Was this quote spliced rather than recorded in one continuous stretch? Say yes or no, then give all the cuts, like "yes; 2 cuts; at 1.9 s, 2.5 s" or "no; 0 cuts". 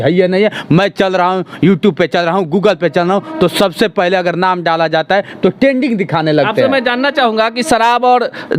no; 0 cuts